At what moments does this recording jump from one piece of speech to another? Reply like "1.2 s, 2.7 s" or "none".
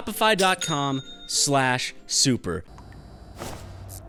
none